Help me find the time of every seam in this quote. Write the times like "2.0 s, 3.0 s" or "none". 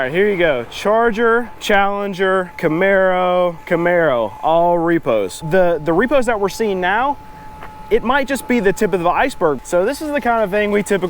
1.5 s, 2.5 s, 3.6 s, 5.4 s, 9.6 s